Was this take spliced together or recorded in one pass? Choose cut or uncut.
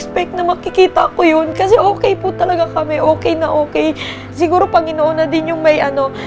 cut